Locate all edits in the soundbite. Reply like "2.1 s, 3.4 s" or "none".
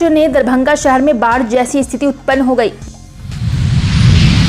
2.8 s